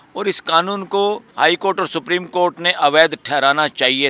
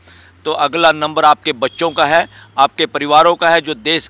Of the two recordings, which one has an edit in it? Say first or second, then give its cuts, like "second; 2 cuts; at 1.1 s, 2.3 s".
first; 1 cut; at 1.3 s